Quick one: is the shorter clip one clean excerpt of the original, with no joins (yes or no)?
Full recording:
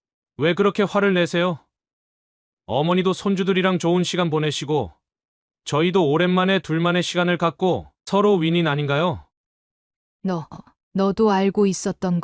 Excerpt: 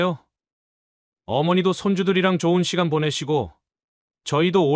yes